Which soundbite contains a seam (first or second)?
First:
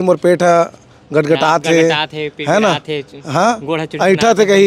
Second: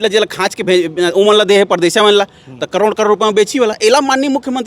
second